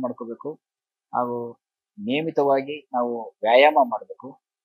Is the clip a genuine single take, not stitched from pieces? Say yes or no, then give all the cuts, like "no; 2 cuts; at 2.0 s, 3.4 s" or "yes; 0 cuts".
yes; 0 cuts